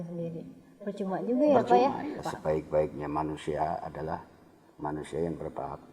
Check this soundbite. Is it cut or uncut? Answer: cut